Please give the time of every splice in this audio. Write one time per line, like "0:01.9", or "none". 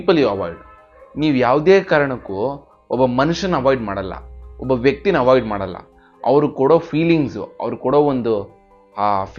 none